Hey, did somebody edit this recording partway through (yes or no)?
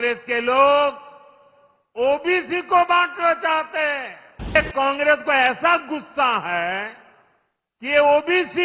yes